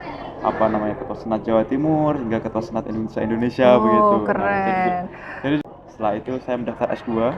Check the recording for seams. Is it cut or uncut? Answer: cut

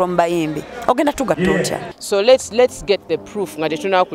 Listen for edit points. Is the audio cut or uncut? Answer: cut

